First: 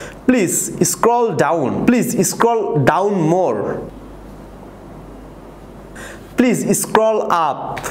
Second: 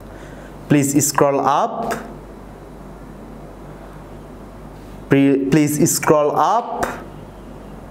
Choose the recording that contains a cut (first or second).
first